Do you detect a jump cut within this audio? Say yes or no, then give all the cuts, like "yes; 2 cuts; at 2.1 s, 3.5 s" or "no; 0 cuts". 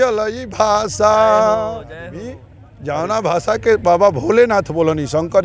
no; 0 cuts